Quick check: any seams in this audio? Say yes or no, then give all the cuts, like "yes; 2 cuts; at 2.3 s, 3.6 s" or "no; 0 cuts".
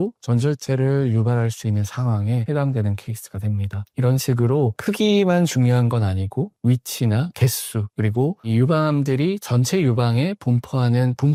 no; 0 cuts